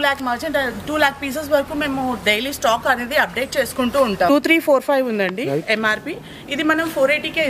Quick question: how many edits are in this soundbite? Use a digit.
1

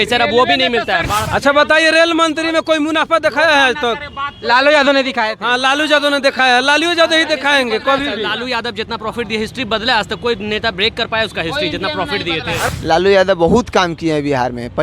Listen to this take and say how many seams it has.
2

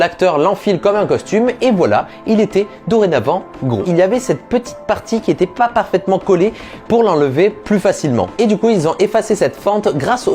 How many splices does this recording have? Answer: 1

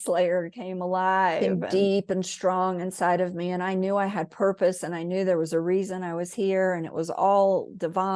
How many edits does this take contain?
1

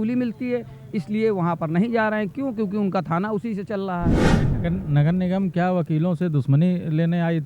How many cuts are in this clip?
1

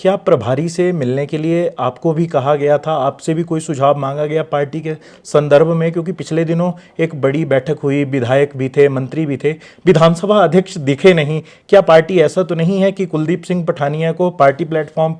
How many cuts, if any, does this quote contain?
0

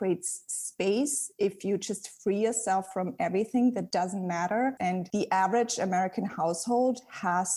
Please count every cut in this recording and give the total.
2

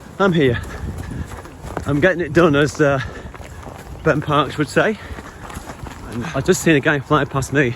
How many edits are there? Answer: 1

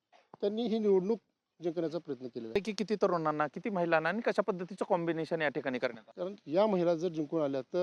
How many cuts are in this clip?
2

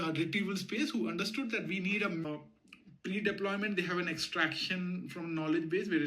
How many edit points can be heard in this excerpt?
1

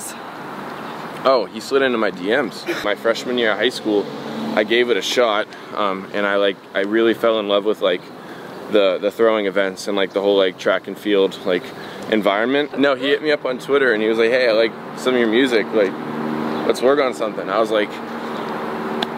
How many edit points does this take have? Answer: 2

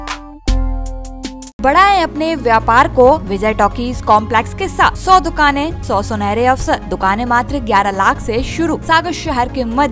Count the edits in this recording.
6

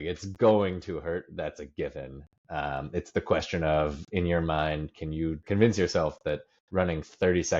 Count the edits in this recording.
1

